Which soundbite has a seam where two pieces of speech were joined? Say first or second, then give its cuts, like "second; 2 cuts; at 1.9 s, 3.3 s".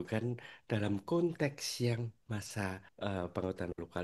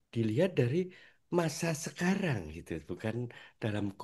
first; 1 cut; at 2.5 s